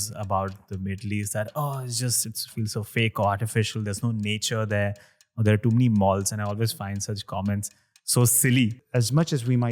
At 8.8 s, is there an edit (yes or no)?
yes